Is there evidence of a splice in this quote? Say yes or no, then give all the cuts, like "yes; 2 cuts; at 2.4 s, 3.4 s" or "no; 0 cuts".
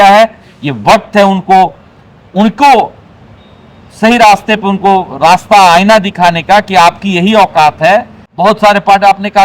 yes; 1 cut; at 8.2 s